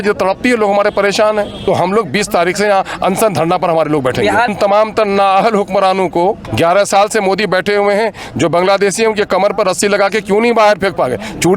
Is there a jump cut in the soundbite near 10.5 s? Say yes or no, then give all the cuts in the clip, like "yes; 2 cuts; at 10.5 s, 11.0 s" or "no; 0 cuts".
no; 3 cuts; at 1.6 s, 4.5 s, 6.5 s